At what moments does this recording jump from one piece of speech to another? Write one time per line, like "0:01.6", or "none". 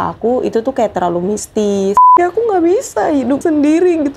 0:02.1
0:03.4